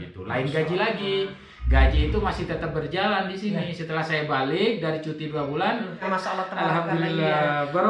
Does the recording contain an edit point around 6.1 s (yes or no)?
yes